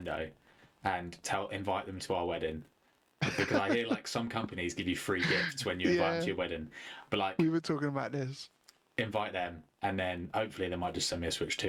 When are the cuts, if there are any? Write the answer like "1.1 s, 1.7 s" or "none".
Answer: none